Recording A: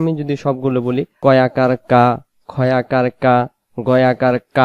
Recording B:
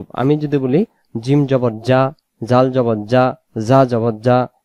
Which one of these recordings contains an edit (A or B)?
A